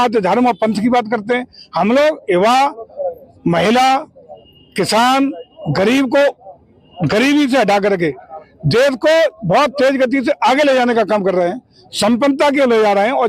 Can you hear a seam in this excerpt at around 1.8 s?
no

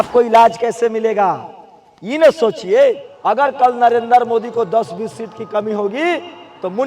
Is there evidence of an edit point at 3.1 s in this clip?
yes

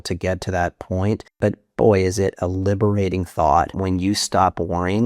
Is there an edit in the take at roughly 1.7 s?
no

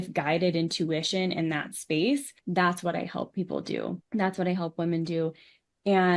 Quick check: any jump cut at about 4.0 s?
yes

